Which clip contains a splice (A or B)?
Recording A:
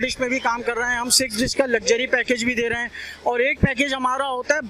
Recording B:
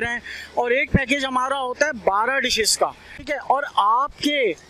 B